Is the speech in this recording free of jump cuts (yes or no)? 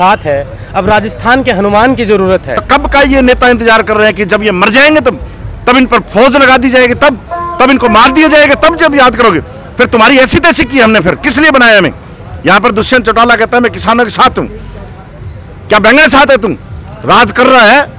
no